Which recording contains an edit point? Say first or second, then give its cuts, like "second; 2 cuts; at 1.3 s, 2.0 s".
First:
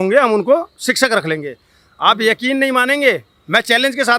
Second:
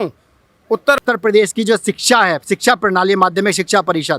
second; 1 cut; at 1.0 s